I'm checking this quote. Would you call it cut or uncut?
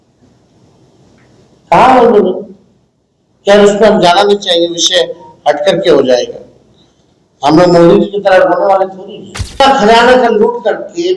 cut